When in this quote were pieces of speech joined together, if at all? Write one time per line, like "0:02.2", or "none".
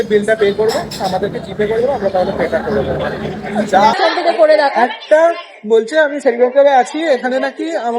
0:04.0